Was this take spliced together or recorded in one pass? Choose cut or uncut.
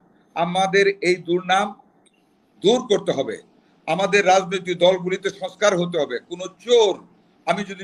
uncut